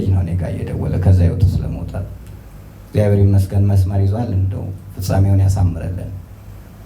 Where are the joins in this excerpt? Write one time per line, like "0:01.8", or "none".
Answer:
none